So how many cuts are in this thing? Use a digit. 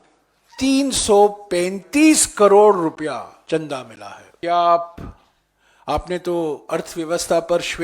2